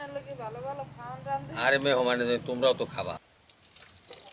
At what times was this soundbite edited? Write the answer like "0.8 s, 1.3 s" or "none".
3.2 s